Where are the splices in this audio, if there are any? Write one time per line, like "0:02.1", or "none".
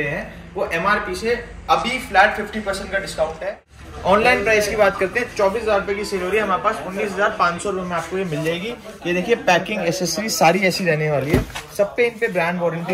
0:03.7

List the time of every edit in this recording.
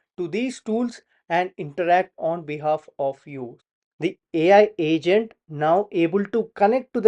0:03.5

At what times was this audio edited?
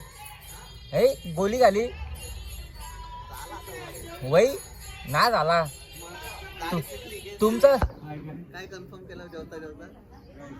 0:07.9

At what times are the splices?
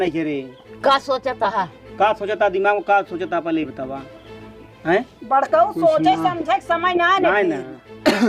none

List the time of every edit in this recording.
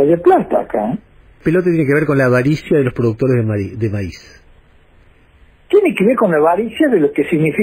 0:01.4

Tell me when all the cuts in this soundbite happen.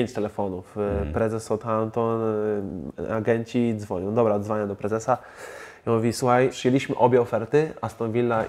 0:06.6

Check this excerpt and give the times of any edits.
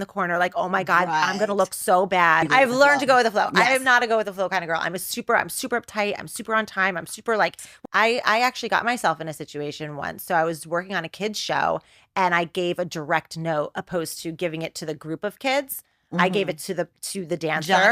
0:02.5
0:07.7

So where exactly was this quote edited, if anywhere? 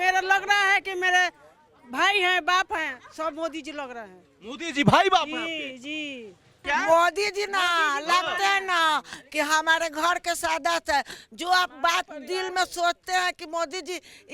0:06.5

